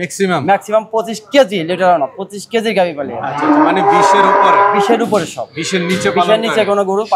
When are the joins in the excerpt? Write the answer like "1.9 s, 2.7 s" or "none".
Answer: none